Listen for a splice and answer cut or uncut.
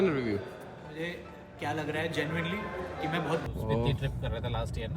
cut